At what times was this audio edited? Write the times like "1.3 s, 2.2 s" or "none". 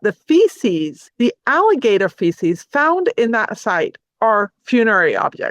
1.0 s